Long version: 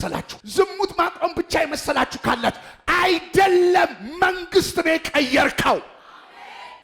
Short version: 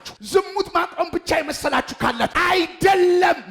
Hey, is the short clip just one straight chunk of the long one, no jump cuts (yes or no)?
no